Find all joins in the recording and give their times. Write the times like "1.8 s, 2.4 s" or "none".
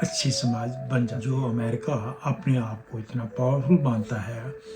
1.2 s